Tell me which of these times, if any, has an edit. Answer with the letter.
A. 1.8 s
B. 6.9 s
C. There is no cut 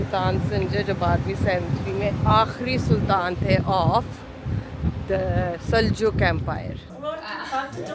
B